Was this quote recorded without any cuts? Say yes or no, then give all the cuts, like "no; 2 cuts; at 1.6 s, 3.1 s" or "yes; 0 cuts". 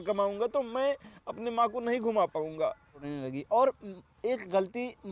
no; 1 cut; at 3.1 s